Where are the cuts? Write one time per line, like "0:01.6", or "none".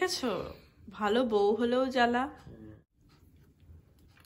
0:02.8